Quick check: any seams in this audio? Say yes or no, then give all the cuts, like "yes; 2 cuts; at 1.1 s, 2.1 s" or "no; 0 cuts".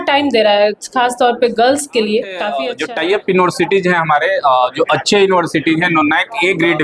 yes; 1 cut; at 2.7 s